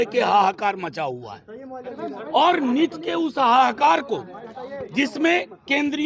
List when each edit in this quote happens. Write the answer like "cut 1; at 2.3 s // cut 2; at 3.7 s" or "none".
none

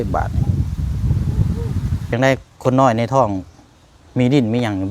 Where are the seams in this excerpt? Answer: cut 1; at 2.1 s

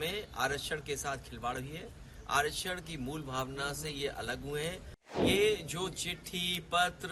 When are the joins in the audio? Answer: cut 1; at 5.2 s

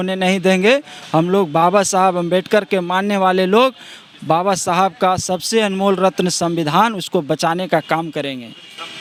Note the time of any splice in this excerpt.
none

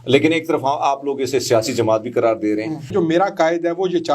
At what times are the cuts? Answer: cut 1; at 2.9 s

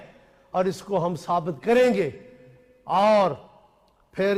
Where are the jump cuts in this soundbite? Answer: none

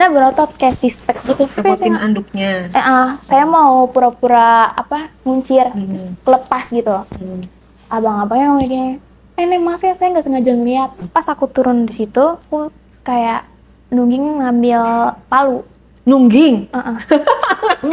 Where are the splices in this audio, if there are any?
cut 1; at 1.6 s // cut 2; at 11.0 s

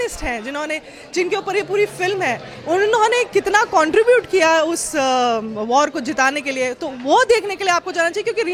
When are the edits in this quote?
none

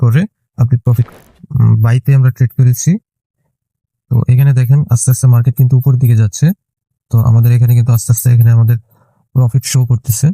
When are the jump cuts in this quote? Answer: cut 1; at 1.1 s

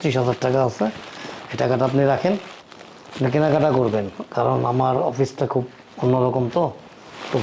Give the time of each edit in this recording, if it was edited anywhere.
none

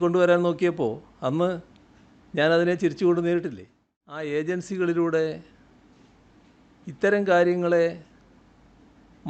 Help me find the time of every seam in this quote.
cut 1; at 4.2 s

